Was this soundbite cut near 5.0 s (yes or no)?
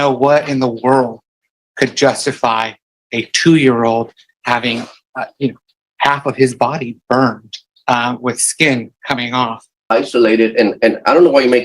yes